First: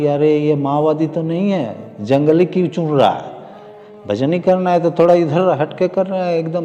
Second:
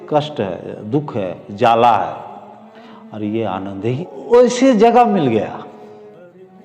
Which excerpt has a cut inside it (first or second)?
second